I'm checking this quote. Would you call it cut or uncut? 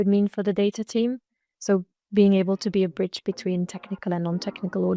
uncut